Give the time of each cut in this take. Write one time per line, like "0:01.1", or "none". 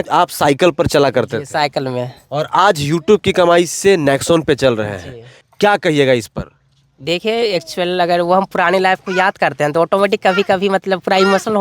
none

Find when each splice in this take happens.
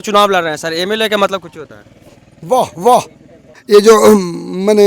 0:03.5

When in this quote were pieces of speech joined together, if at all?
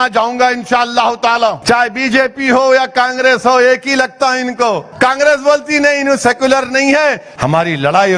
0:01.6
0:04.9
0:07.3

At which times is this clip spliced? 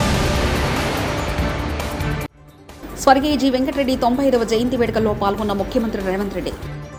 none

